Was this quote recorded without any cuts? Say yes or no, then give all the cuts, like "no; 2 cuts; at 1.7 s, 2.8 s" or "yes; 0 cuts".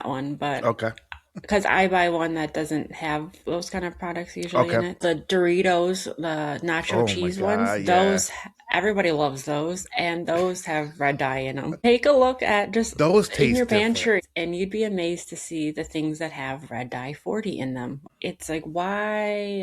no; 4 cuts; at 5.0 s, 11.8 s, 14.2 s, 18.0 s